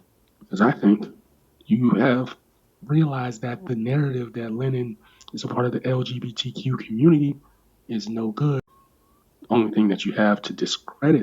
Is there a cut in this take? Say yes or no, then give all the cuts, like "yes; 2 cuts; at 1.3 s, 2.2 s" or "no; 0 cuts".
yes; 1 cut; at 8.6 s